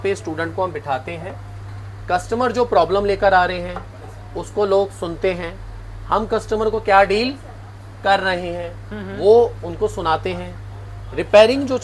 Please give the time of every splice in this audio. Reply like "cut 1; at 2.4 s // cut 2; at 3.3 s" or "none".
none